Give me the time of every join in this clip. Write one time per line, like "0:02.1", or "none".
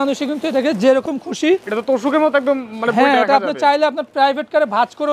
none

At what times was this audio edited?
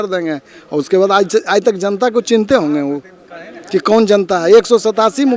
none

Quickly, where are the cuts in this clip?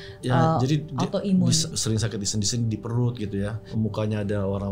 0:01.8
0:03.6

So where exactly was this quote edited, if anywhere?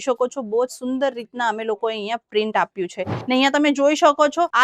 0:03.1

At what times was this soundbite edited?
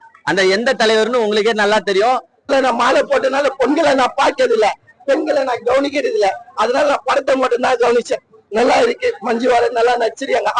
0:02.3

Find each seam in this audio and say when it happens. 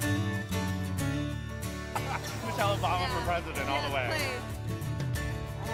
none

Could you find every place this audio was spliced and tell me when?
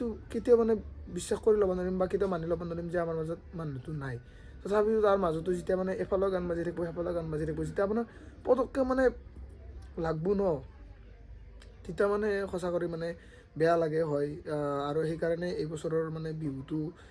none

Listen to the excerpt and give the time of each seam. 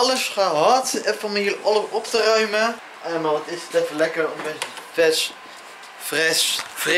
0:02.9

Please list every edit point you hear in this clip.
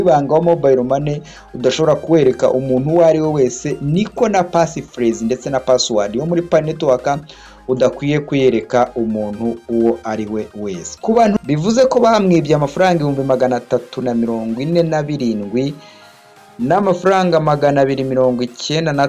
0:11.4

